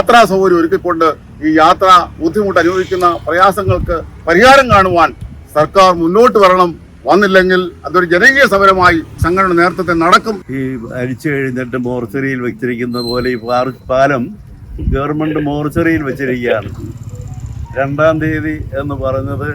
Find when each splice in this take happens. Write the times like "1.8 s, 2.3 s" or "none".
9.1 s, 10.4 s